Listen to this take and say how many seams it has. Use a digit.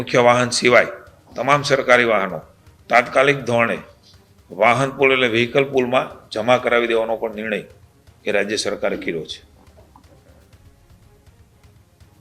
0